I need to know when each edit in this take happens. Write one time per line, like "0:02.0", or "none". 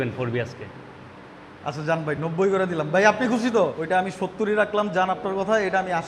0:04.0